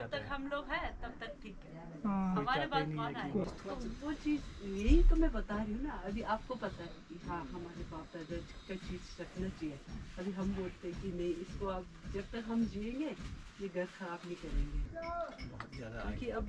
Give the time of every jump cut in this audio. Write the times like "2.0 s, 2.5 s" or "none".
3.4 s, 14.9 s